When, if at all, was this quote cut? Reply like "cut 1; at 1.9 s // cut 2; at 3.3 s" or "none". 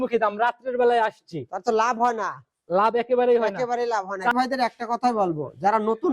cut 1; at 4.3 s